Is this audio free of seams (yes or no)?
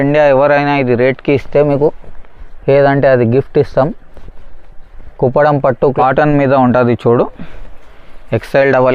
no